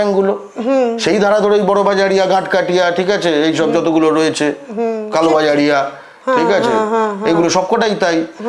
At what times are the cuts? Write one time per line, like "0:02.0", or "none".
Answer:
none